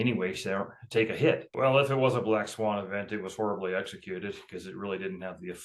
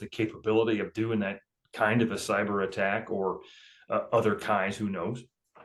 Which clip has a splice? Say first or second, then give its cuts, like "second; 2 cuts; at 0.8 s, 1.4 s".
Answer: first; 1 cut; at 1.5 s